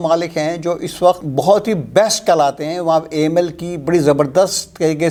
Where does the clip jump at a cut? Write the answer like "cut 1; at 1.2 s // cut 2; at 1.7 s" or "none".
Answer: none